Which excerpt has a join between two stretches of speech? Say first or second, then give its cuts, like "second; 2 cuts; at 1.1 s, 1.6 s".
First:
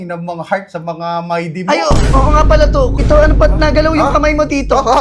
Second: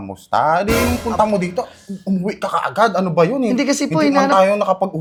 first; 1 cut; at 3.0 s